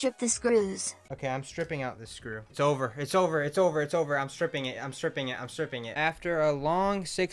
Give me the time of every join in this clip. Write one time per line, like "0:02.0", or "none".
0:00.9
0:02.4
0:05.9